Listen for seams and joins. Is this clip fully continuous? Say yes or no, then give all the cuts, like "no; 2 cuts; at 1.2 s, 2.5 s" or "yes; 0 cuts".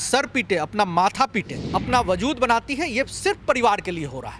no; 1 cut; at 1.6 s